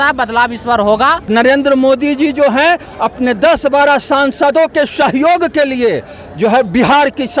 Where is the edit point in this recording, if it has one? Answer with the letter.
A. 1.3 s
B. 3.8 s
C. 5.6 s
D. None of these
A